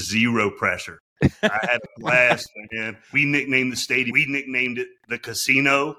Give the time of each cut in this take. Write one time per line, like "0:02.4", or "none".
0:03.0
0:04.1